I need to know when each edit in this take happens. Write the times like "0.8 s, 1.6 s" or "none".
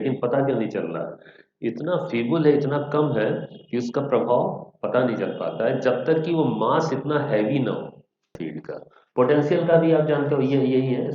8.4 s